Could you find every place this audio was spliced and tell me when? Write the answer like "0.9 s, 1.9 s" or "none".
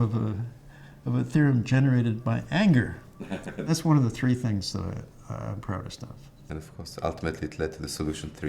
3.7 s, 6.3 s